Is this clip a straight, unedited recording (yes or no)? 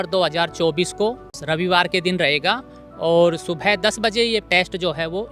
no